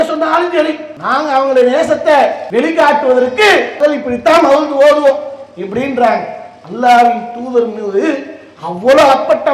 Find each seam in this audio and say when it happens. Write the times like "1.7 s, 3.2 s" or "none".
0.9 s, 2.4 s, 3.7 s